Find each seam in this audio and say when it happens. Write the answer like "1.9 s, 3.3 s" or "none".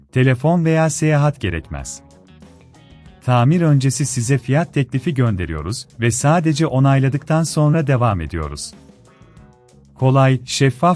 none